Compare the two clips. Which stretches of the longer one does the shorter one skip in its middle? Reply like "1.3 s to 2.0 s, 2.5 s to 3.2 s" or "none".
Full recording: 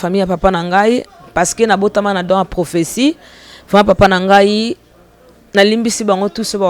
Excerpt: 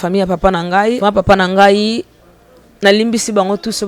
1.0 s to 3.7 s